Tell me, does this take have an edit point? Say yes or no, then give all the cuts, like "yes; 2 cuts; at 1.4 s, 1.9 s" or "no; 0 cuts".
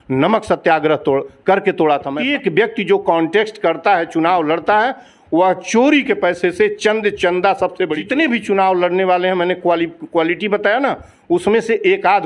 yes; 2 cuts; at 2.2 s, 8.0 s